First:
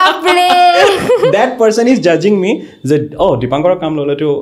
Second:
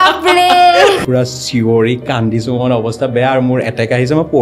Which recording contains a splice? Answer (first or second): second